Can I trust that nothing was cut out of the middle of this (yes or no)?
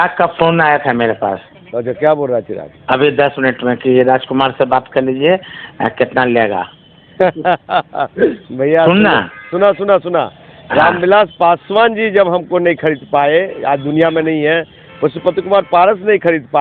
yes